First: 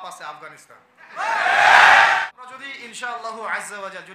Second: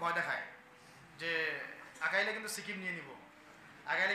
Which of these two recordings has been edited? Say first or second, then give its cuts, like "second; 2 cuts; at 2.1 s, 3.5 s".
first; 1 cut; at 2.2 s